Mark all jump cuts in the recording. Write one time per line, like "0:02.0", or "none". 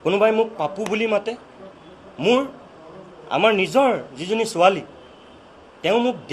none